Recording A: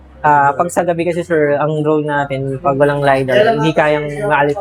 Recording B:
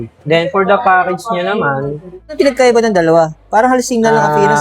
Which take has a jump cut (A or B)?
B